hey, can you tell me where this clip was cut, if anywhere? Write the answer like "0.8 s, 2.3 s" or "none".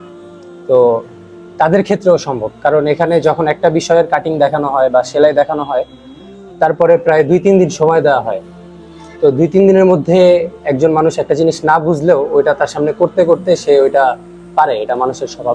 none